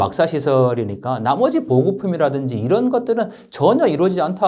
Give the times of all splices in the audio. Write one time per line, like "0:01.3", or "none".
none